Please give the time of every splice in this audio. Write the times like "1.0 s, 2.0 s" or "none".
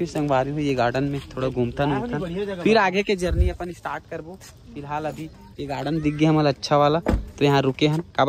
none